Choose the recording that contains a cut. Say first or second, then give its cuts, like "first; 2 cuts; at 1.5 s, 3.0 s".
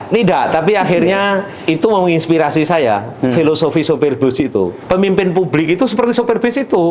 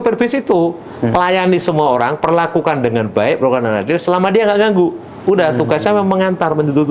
first; 1 cut; at 4.8 s